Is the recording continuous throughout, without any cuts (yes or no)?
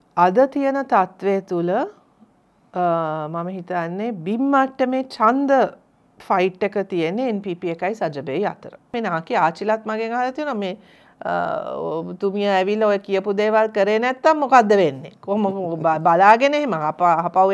no